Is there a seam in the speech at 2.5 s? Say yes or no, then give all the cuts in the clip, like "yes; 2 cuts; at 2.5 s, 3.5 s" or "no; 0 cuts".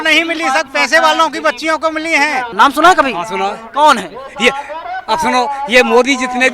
yes; 1 cut; at 2.5 s